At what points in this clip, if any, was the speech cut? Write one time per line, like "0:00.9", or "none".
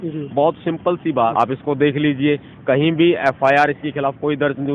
0:01.3